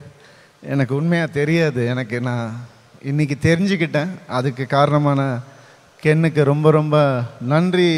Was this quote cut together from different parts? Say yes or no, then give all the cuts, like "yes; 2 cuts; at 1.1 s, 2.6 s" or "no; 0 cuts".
no; 0 cuts